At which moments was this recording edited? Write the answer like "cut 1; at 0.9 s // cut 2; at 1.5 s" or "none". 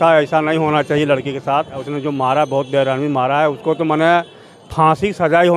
cut 1; at 1.9 s